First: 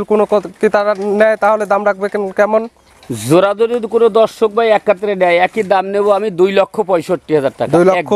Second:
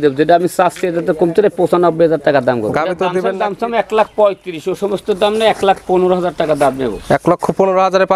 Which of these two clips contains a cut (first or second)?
second